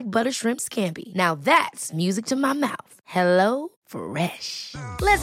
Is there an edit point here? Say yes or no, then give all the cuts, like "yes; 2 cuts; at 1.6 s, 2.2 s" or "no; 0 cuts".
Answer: no; 0 cuts